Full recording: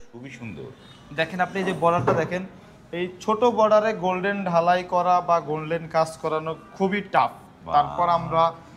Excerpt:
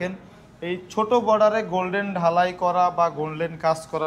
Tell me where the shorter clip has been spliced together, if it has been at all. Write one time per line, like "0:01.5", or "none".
none